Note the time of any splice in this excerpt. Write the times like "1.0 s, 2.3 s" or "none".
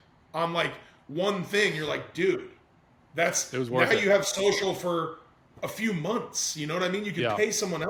none